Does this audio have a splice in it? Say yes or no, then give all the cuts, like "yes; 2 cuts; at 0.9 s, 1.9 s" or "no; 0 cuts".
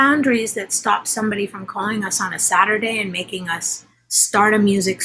no; 0 cuts